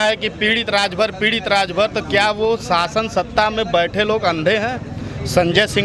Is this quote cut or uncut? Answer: uncut